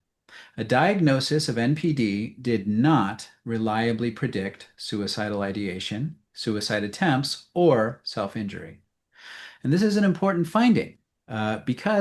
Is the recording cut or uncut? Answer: uncut